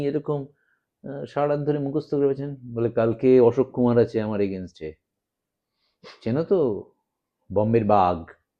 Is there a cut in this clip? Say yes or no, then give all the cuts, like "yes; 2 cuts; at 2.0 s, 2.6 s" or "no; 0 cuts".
no; 0 cuts